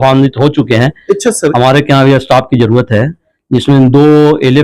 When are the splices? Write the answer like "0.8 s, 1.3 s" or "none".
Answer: 1.5 s